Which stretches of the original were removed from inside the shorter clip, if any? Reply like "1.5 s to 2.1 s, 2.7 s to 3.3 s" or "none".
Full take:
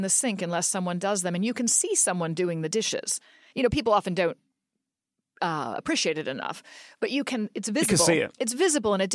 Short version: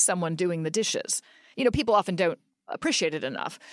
4.7 s to 5.8 s